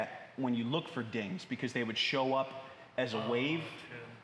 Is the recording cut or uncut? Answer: uncut